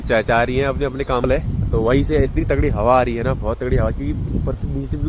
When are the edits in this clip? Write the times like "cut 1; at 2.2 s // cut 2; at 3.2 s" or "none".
cut 1; at 1.2 s